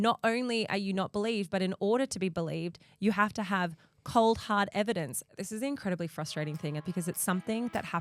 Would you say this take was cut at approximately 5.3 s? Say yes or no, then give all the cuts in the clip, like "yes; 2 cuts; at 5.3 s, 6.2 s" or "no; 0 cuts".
yes; 2 cuts; at 5.3 s, 6.8 s